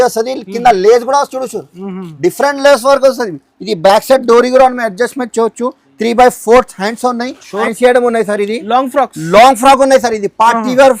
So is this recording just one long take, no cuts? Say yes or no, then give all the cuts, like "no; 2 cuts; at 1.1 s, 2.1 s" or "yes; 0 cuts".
no; 1 cut; at 7.7 s